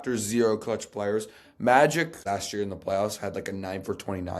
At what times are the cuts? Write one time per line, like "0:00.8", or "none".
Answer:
0:02.2